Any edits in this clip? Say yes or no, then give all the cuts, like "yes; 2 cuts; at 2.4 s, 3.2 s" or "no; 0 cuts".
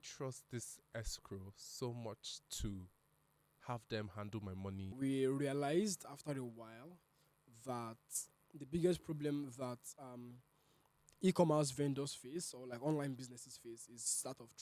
yes; 2 cuts; at 4.9 s, 8.3 s